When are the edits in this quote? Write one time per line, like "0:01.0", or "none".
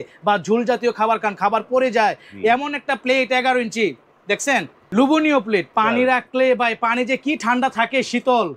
0:04.8
0:05.7